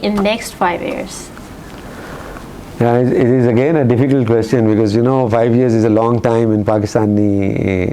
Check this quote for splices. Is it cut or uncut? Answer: uncut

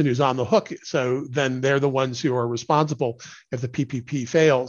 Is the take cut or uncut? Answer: uncut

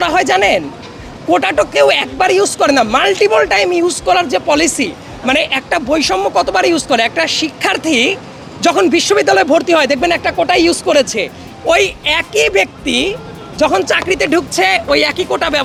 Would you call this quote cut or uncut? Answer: uncut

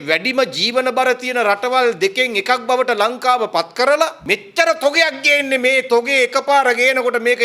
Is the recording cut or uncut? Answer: cut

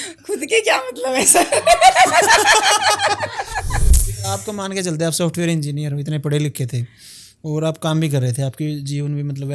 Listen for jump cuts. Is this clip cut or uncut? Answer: cut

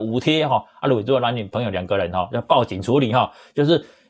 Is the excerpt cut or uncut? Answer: uncut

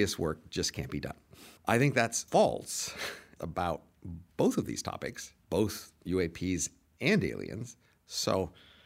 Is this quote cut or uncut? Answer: cut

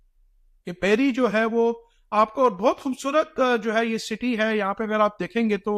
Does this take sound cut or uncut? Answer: uncut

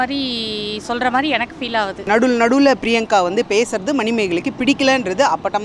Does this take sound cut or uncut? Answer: cut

